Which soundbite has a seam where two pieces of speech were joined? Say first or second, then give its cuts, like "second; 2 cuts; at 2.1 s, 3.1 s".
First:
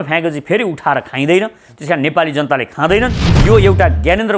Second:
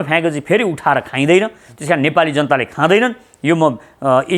first; 1 cut; at 3.3 s